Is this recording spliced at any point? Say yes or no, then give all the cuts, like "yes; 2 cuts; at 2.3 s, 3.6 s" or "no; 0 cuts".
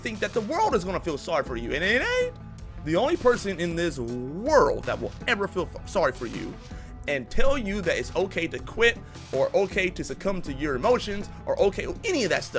no; 0 cuts